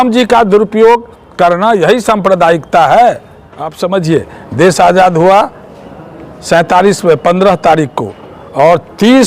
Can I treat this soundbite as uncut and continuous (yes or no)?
no